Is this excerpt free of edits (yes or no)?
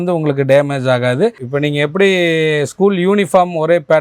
no